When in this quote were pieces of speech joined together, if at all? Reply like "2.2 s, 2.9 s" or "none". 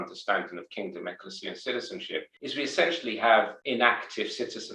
2.3 s, 3.6 s